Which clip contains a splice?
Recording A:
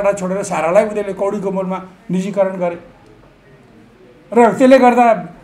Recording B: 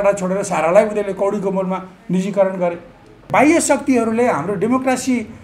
B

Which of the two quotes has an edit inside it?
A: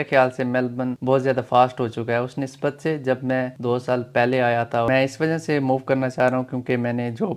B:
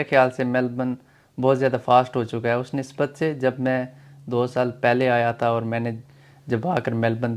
A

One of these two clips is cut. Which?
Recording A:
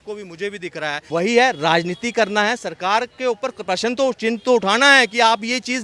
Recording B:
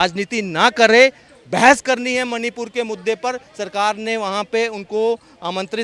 A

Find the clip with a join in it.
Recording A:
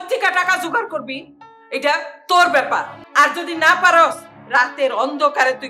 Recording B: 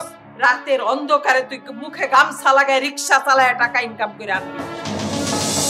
A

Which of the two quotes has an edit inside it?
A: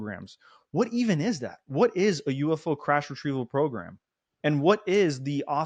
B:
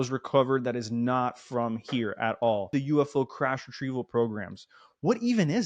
B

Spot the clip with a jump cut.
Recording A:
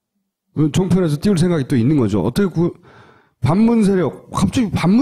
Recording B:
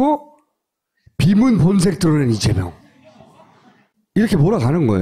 A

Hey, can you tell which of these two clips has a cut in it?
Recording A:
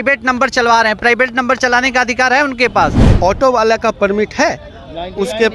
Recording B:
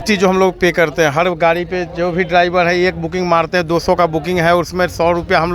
A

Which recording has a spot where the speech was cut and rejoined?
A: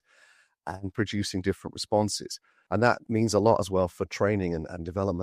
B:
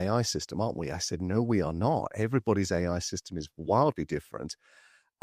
A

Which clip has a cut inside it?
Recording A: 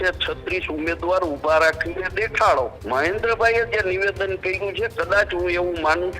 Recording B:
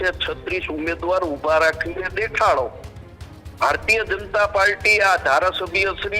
A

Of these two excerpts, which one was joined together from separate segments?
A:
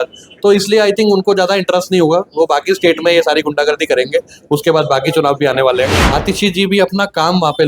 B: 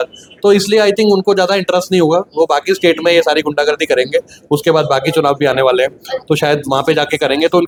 A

